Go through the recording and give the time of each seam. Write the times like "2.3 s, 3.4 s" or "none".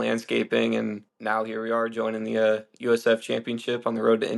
1.1 s